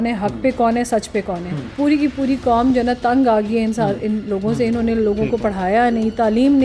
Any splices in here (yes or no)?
yes